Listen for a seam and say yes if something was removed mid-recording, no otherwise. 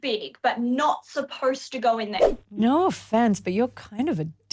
yes